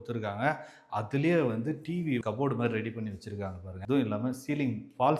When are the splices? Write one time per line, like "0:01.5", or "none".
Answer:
0:03.7